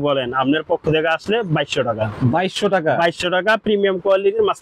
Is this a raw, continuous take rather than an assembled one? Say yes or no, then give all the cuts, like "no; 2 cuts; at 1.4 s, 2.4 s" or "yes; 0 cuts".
yes; 0 cuts